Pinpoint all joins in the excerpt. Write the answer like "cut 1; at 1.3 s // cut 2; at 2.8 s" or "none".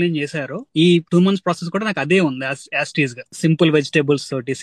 cut 1; at 1.0 s // cut 2; at 3.3 s